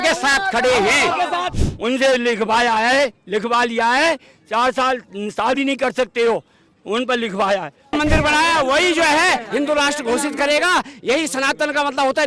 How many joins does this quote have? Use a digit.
2